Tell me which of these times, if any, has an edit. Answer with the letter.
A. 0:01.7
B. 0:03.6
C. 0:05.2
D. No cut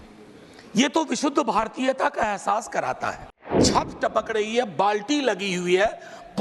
B